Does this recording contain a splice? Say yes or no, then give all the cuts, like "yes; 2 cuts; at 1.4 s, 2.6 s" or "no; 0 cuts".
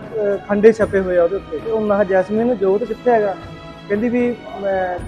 yes; 1 cut; at 1.5 s